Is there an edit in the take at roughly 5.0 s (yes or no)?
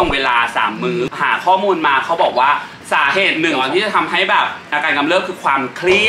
no